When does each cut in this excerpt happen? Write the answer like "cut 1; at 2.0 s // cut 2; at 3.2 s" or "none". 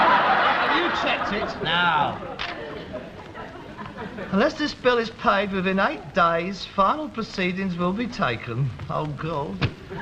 cut 1; at 5.2 s